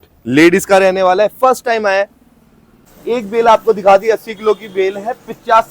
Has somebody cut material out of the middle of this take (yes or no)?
yes